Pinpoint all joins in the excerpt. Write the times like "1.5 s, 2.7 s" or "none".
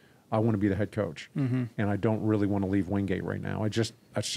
none